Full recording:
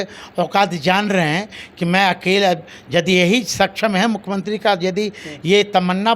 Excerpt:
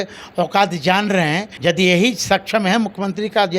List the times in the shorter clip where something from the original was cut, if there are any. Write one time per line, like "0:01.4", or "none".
0:01.5

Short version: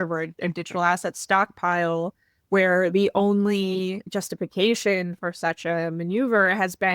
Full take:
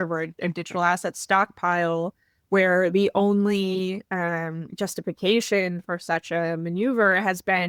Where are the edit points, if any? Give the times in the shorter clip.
0:04.0

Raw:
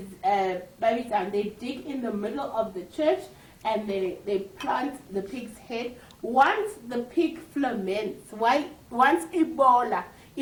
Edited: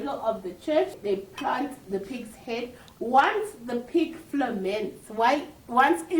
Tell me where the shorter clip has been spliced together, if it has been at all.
0:01.0

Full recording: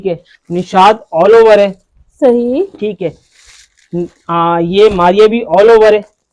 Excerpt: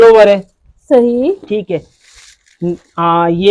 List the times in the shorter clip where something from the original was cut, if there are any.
none

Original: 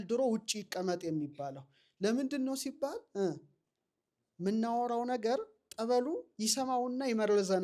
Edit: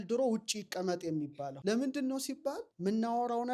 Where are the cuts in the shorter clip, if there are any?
0:01.5
0:02.7

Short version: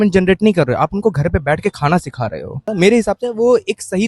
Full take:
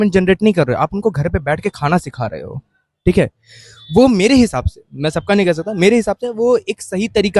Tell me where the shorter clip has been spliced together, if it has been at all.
0:02.7

